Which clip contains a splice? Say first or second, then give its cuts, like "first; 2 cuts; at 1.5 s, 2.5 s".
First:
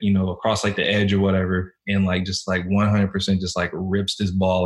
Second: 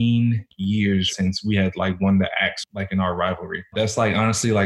second; 3 cuts; at 0.8 s, 2.6 s, 3.7 s